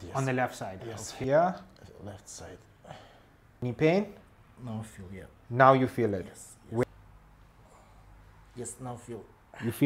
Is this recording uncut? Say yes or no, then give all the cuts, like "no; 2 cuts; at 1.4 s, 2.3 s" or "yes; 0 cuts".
no; 3 cuts; at 1.2 s, 3.6 s, 6.8 s